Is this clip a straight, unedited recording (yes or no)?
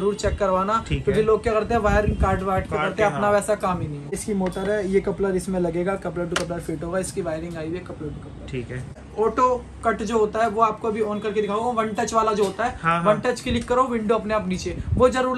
no